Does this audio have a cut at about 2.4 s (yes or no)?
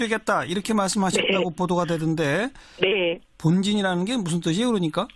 yes